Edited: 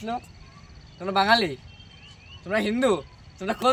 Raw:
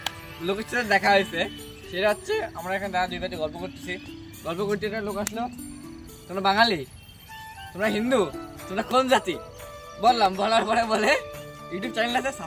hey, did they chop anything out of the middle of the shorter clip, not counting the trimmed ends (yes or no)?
no